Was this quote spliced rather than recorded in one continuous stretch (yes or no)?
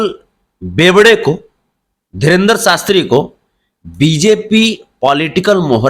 no